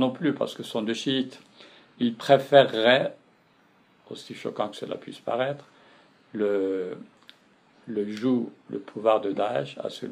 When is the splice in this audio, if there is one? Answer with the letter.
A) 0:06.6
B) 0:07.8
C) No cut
C